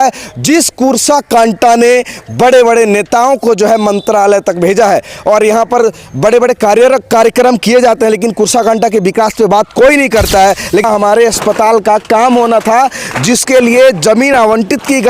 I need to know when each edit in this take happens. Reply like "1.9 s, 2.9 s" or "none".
10.8 s